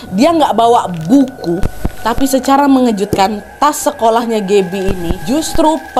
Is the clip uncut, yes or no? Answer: yes